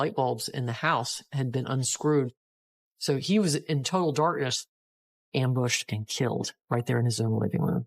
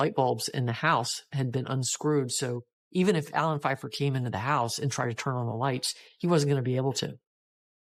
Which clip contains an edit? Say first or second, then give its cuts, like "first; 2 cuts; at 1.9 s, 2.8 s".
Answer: first; 2 cuts; at 2.3 s, 5.1 s